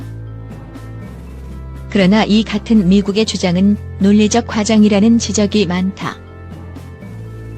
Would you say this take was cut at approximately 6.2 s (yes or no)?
yes